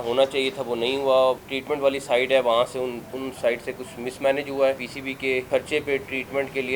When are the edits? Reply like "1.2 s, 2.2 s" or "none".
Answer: 1.5 s, 5.0 s